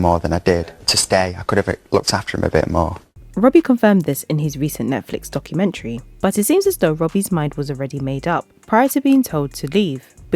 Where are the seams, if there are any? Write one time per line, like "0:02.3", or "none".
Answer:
none